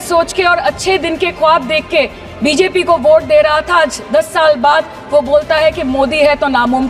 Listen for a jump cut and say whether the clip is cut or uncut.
uncut